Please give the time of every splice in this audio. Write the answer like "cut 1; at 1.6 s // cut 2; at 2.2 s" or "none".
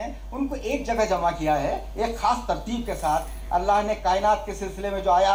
none